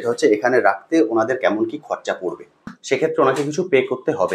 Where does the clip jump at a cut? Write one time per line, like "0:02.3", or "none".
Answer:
0:02.7